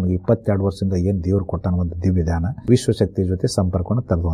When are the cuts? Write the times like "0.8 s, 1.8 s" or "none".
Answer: 2.5 s